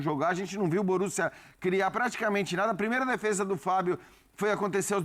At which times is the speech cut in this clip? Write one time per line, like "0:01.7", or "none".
none